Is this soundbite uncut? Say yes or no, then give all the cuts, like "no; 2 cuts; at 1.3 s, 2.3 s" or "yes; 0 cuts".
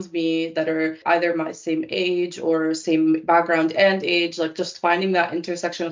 no; 1 cut; at 1.0 s